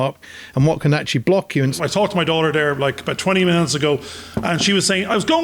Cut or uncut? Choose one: cut